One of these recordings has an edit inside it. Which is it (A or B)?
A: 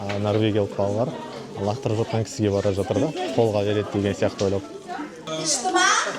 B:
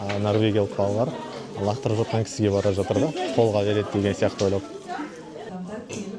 A